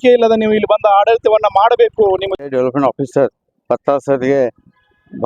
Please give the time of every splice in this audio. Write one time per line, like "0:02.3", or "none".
0:02.3